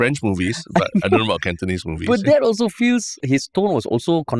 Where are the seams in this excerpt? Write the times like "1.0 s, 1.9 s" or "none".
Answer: 3.2 s

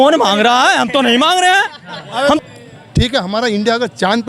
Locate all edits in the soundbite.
2.4 s

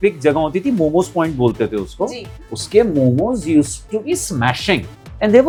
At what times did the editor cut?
none

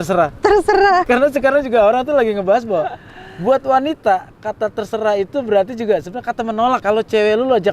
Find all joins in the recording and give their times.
1.0 s, 6.8 s

